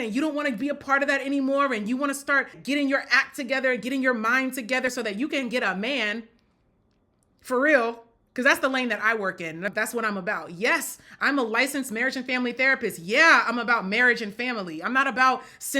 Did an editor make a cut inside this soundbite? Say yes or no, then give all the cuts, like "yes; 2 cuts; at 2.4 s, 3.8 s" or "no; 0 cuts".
yes; 3 cuts; at 2.6 s, 4.9 s, 9.7 s